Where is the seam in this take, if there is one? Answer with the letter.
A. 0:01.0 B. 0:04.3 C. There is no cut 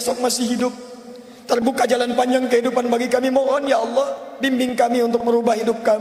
C